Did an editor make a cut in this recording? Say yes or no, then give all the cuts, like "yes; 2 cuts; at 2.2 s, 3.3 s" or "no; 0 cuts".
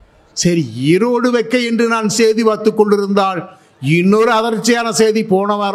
no; 0 cuts